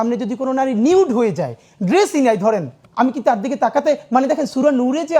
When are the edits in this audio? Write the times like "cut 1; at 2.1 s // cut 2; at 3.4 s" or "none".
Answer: cut 1; at 2.8 s